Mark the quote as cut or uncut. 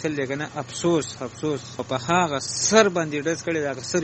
cut